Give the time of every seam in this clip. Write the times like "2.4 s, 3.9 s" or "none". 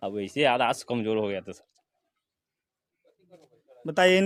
none